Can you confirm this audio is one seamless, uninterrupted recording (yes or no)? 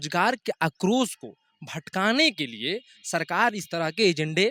yes